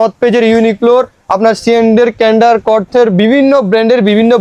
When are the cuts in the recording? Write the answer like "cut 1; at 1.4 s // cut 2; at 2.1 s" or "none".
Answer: none